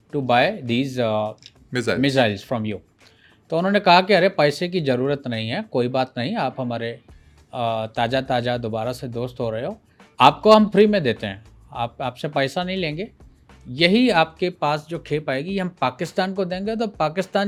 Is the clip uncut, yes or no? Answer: yes